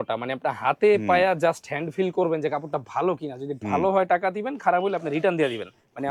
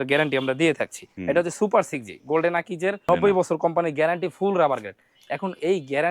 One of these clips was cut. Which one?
second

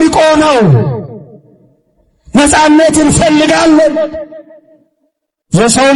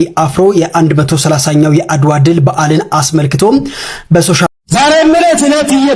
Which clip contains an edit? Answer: second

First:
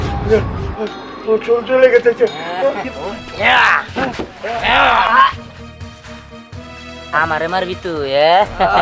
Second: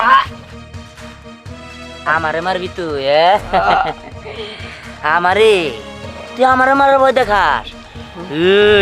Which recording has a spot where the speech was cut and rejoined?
first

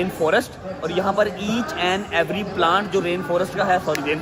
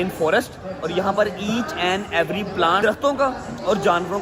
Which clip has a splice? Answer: second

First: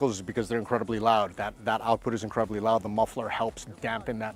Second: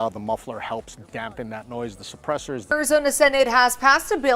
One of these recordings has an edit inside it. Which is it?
second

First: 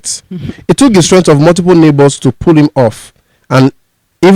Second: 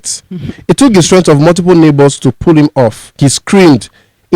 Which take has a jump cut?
second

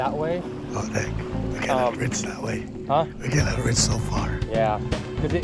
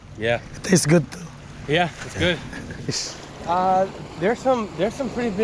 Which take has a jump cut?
second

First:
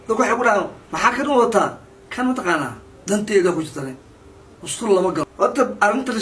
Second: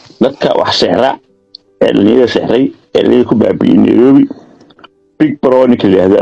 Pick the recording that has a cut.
first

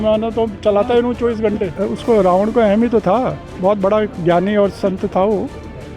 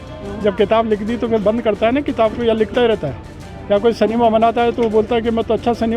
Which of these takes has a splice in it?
first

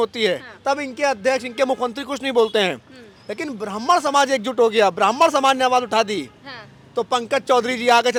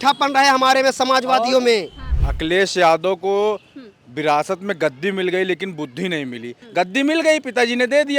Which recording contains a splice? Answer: second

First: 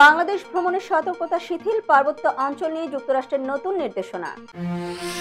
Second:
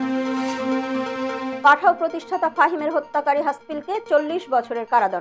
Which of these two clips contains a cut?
second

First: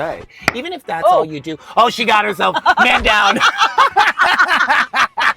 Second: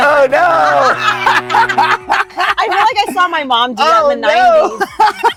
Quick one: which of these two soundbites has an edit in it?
first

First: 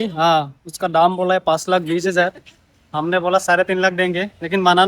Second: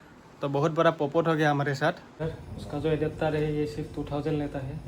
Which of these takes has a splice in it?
second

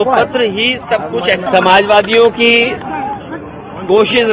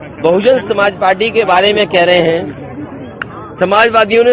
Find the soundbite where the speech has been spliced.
first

